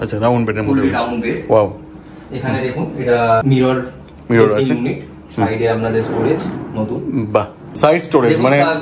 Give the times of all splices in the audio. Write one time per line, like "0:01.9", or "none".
0:03.4
0:07.7